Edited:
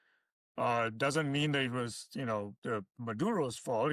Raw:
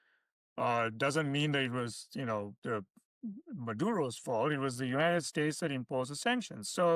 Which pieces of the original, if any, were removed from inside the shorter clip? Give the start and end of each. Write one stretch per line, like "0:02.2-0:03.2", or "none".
0:02.9-0:03.5